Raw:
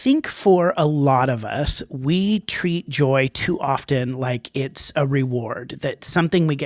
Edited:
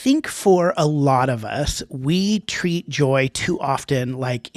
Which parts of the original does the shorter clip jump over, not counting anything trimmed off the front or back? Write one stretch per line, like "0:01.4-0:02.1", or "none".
none